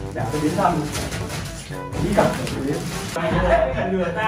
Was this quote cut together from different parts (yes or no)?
yes